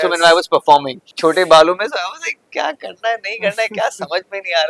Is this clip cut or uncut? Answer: cut